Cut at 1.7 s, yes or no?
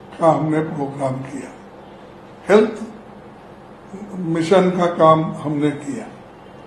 no